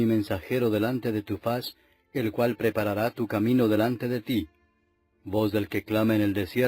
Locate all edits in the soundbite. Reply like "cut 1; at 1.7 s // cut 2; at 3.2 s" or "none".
cut 1; at 1.0 s